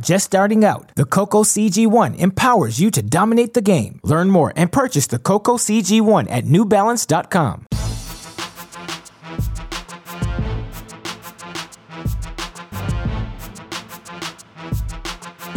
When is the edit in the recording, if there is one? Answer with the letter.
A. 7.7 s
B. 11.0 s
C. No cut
A